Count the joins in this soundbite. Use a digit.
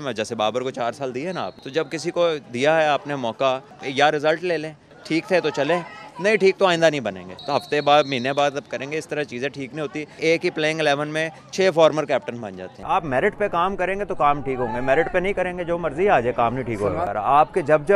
7